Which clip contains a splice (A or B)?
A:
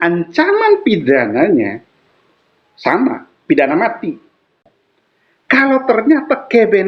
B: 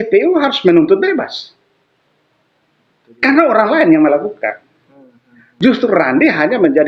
A